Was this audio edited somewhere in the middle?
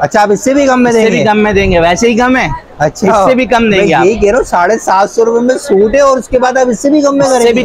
no; 0 cuts

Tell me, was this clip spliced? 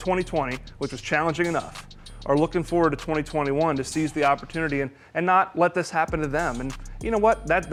no; 0 cuts

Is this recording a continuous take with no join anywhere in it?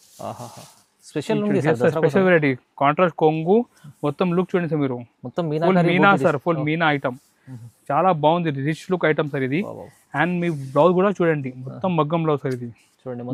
yes; 0 cuts

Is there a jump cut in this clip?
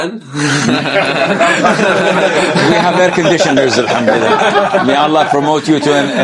no; 0 cuts

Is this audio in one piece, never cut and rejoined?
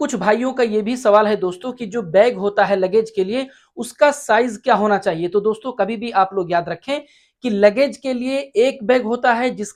yes; 0 cuts

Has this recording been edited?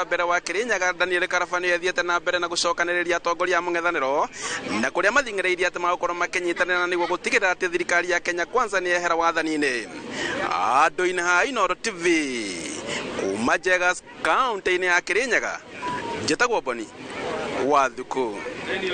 no; 0 cuts

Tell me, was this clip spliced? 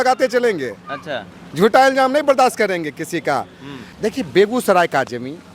yes; 1 cut; at 3.9 s

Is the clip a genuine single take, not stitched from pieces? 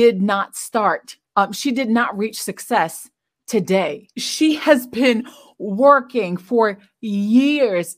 yes; 0 cuts

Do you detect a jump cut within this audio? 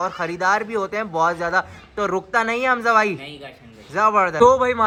no; 0 cuts

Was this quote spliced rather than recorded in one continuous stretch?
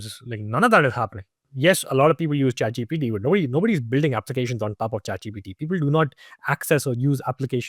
no; 0 cuts

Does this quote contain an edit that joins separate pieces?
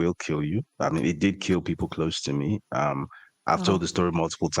no; 0 cuts

